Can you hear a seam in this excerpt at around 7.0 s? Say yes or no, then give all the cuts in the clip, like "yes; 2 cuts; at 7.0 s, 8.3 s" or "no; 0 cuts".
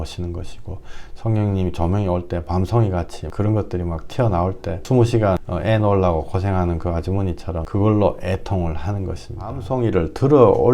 no; 1 cut; at 9.7 s